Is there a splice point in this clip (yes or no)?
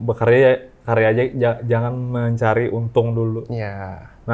no